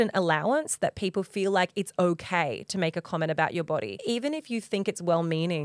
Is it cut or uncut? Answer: cut